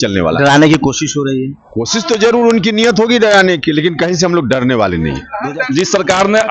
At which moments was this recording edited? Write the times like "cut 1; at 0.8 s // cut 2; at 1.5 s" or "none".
cut 1; at 5.3 s

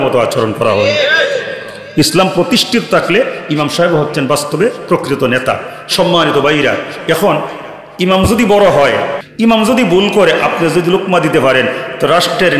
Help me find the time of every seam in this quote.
cut 1; at 9.2 s

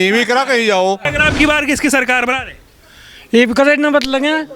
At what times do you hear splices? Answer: cut 1; at 1.1 s

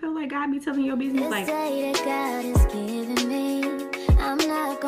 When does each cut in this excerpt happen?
cut 1; at 1.3 s

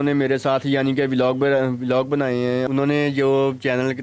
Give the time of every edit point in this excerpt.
cut 1; at 2.7 s

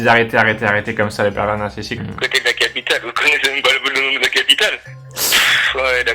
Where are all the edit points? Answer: cut 1; at 2.0 s // cut 2; at 5.1 s

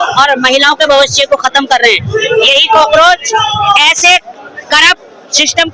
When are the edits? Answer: none

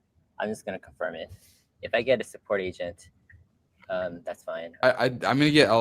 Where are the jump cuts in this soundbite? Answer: cut 1; at 4.6 s

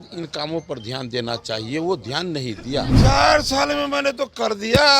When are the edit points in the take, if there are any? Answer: cut 1; at 2.9 s

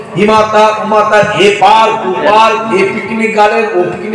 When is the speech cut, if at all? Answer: none

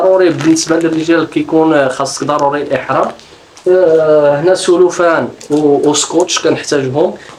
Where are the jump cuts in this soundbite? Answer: none

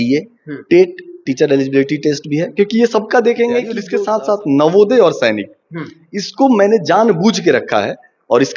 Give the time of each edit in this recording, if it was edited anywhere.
cut 1; at 3.8 s

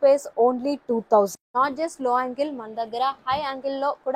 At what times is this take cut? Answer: cut 1; at 1.4 s

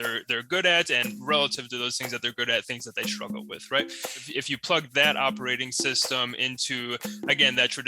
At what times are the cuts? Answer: cut 1; at 4.3 s

